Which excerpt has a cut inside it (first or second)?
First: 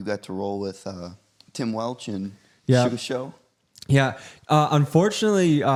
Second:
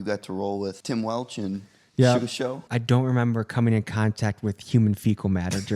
second